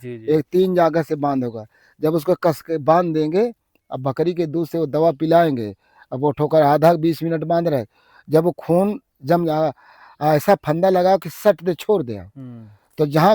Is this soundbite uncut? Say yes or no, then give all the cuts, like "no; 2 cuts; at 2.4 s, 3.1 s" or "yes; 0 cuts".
yes; 0 cuts